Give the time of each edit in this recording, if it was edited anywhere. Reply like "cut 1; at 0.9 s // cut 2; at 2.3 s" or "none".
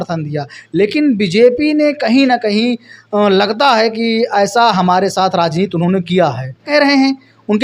cut 1; at 6.7 s